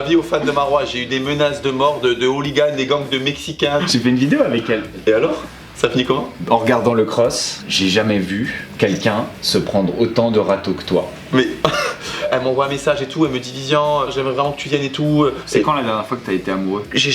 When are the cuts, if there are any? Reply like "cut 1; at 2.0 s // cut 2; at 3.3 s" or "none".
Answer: cut 1; at 3.8 s // cut 2; at 6.4 s // cut 3; at 12.2 s // cut 4; at 15.3 s